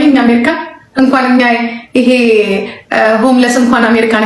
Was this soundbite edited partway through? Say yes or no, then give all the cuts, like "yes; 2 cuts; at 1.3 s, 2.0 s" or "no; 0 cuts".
no; 0 cuts